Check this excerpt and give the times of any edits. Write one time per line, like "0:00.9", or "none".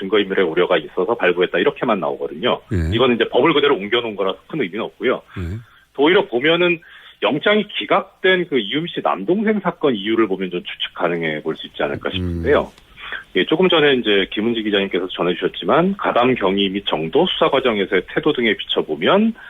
0:13.7